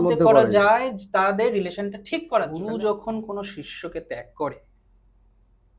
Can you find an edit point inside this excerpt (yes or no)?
yes